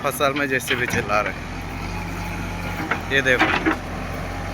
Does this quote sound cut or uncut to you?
uncut